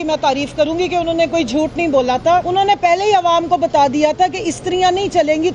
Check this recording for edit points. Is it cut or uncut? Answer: cut